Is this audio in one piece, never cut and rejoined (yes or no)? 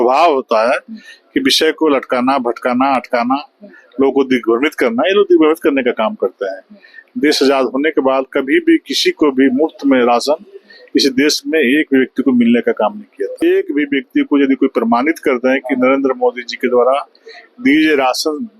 no